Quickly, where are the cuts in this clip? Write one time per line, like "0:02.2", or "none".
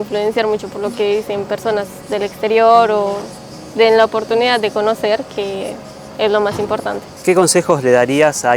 0:07.1